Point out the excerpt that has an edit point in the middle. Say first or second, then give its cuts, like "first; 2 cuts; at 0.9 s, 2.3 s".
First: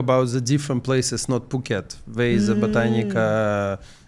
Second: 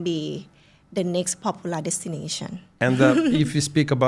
second; 1 cut; at 2.6 s